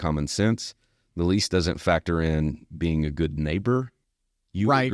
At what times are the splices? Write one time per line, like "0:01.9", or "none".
0:03.9